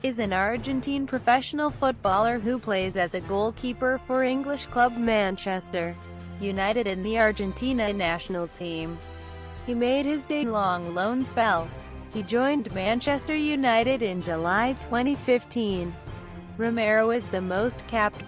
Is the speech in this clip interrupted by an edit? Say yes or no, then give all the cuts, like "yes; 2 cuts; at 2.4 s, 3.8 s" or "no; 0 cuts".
no; 0 cuts